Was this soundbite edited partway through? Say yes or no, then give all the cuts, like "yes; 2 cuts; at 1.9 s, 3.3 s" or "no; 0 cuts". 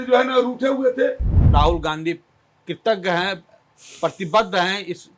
yes; 1 cut; at 1.4 s